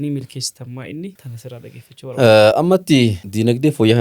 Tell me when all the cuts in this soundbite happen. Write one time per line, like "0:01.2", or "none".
none

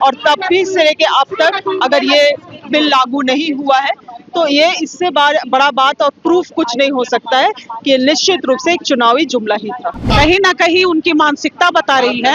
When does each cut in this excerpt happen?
0:10.0

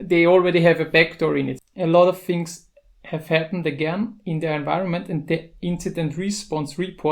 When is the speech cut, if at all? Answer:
0:01.6

